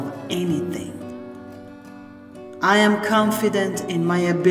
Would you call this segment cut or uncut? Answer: uncut